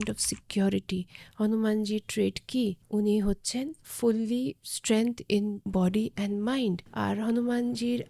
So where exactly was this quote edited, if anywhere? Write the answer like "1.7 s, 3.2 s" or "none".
2.8 s, 3.8 s, 5.6 s, 6.9 s